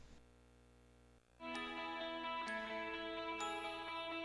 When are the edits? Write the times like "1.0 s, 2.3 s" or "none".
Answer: none